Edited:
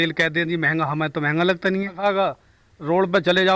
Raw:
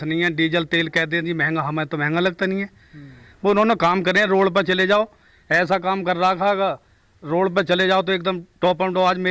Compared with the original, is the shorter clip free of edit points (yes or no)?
no